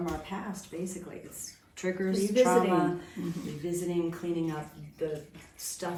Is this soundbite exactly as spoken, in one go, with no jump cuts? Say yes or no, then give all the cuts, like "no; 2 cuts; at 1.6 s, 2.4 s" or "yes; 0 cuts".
yes; 0 cuts